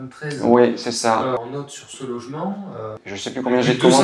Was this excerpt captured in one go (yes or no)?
no